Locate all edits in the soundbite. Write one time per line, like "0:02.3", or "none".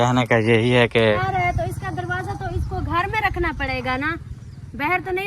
0:01.1